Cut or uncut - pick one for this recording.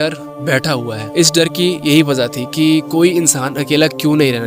cut